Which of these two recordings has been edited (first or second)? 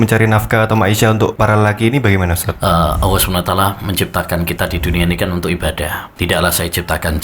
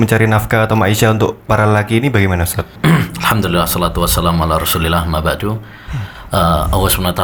first